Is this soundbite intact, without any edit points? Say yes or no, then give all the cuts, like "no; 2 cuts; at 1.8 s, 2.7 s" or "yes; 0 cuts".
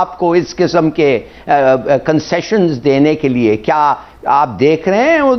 yes; 0 cuts